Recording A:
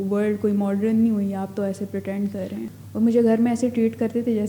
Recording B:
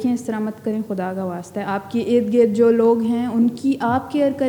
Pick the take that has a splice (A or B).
A